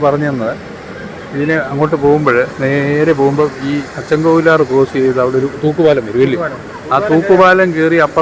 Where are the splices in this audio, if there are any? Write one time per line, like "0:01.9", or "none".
none